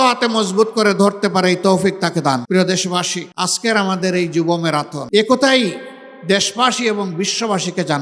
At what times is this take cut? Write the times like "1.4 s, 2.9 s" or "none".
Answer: 2.4 s, 3.2 s, 5.0 s